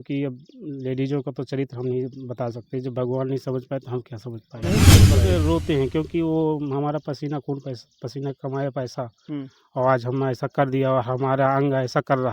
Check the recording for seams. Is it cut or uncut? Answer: cut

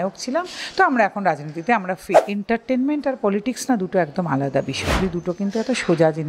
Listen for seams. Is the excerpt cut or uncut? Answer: cut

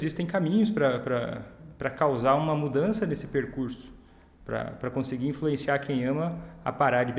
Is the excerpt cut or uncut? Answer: uncut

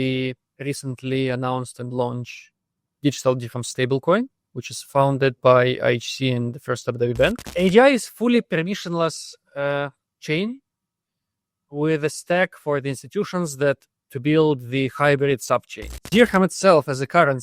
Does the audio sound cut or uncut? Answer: cut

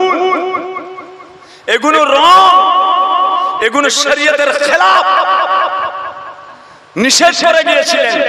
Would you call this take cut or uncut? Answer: uncut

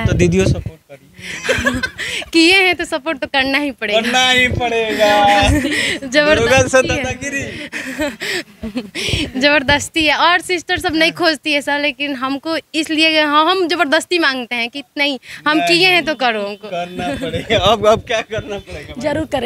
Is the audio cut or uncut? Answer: uncut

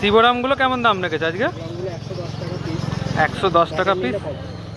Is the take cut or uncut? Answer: uncut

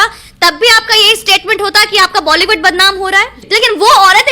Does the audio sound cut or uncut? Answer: cut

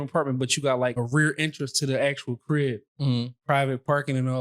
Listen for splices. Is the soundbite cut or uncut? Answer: cut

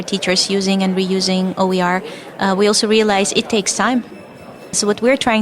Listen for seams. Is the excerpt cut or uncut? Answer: cut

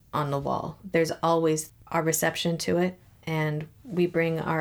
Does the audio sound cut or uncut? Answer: uncut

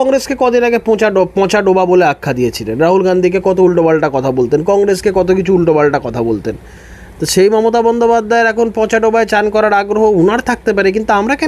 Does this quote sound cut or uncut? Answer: uncut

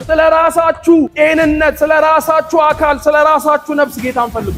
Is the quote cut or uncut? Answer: cut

